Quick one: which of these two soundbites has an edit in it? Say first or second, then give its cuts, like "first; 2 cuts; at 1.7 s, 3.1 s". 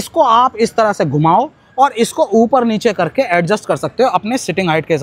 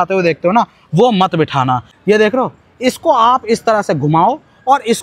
second; 1 cut; at 1.9 s